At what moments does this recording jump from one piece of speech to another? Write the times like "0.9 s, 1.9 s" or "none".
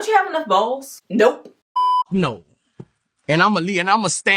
0.9 s, 1.5 s